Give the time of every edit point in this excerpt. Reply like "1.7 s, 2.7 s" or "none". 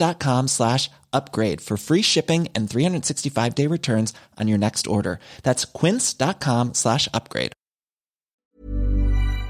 8.3 s